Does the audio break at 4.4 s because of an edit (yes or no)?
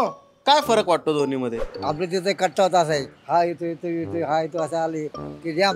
no